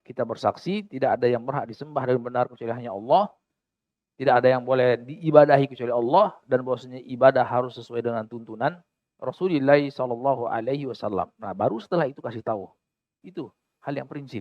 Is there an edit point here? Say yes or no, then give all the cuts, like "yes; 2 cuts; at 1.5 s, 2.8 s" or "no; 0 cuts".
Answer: yes; 1 cut; at 13.2 s